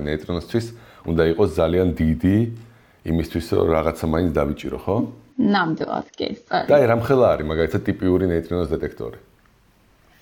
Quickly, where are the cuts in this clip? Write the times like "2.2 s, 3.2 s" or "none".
5.0 s